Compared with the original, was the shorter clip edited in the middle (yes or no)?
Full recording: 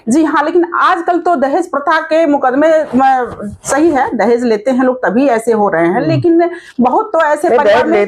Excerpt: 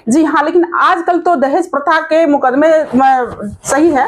no